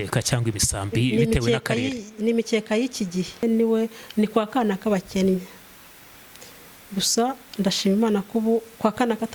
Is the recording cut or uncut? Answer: cut